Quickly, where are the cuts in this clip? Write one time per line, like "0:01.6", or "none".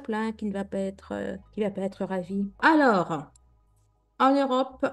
0:02.6